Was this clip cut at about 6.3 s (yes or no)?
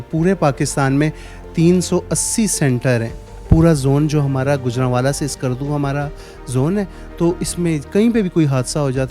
no